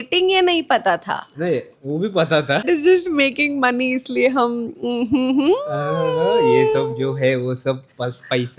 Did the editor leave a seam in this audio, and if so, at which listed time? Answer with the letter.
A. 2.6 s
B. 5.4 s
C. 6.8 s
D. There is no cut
A